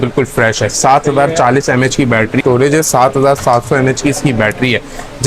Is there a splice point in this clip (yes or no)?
yes